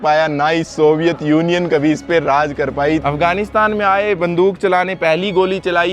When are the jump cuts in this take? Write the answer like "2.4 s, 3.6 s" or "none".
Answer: 3.0 s